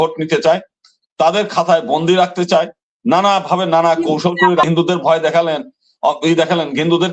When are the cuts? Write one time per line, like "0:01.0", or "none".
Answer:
0:04.7